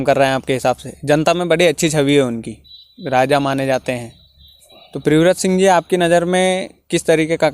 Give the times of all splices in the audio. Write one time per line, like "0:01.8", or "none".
none